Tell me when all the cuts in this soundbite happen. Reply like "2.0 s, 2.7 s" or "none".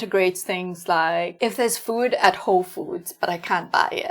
1.3 s